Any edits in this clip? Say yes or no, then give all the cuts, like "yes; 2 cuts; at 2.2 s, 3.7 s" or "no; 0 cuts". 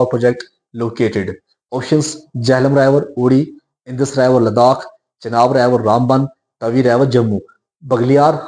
no; 0 cuts